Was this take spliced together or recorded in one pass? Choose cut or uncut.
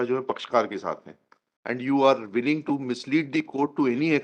cut